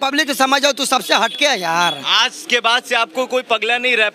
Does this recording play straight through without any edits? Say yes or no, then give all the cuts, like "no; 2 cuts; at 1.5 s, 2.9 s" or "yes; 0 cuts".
yes; 0 cuts